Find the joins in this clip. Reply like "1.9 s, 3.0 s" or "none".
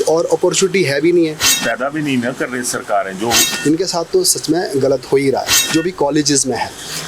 1.5 s, 3.5 s, 5.6 s